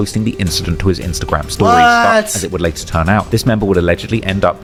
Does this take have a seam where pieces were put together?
no; 0 cuts

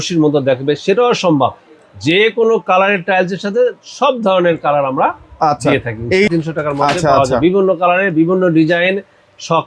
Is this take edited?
yes; 1 cut; at 6.3 s

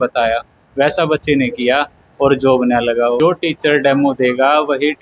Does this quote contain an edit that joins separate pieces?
yes; 1 cut; at 3.2 s

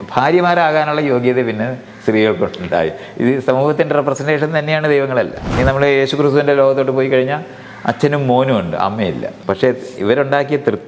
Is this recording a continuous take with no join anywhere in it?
no; 2 cuts; at 5.4 s, 9.4 s

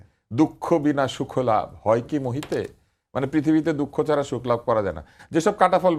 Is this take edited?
no; 0 cuts

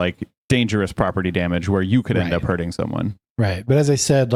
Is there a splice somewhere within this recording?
no; 0 cuts

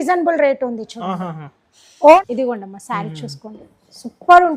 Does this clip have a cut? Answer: yes; 1 cut; at 2.2 s

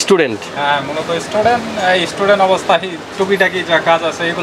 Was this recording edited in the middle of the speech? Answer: no; 0 cuts

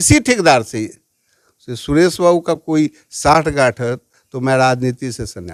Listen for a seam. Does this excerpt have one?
no; 0 cuts

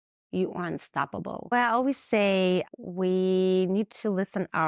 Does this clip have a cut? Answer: yes; 2 cuts; at 1.5 s, 2.7 s

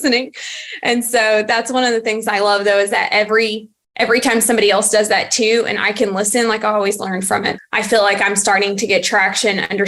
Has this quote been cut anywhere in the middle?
yes; 1 cut; at 7.6 s

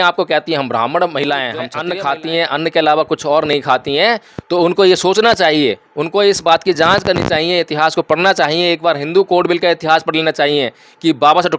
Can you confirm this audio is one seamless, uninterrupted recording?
no; 1 cut; at 1.8 s

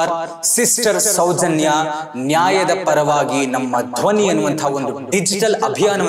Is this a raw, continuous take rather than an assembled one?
yes; 0 cuts

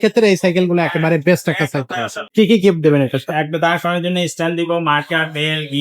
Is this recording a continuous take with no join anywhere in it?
no; 1 cut; at 2.2 s

